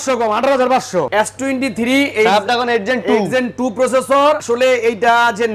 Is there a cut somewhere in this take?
yes; 2 cuts; at 1.1 s, 4.4 s

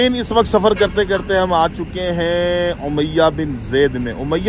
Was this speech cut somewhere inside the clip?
no; 0 cuts

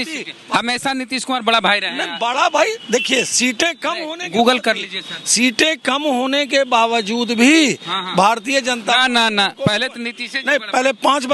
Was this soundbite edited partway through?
no; 0 cuts

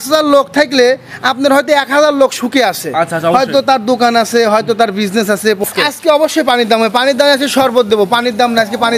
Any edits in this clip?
yes; 1 cut; at 5.6 s

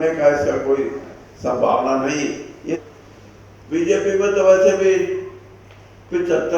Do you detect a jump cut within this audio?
yes; 1 cut; at 2.8 s

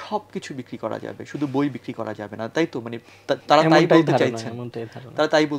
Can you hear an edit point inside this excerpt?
no; 0 cuts

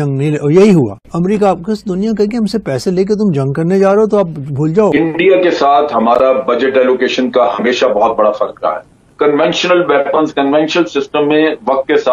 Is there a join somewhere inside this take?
yes; 2 cuts; at 5.0 s, 9.0 s

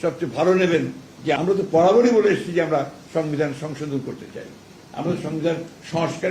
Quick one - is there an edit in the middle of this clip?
yes; 1 cut; at 1.4 s

